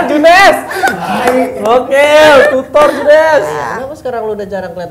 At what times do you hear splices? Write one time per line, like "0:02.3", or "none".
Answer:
0:03.5